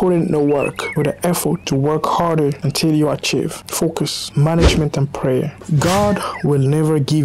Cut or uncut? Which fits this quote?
uncut